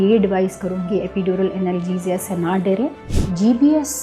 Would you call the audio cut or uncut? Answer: cut